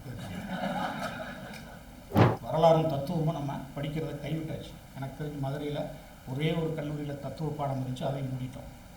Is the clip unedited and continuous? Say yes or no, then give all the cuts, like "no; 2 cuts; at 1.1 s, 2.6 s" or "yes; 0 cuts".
no; 1 cut; at 2.2 s